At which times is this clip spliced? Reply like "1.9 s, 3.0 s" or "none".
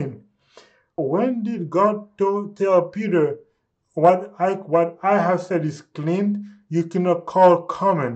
1.0 s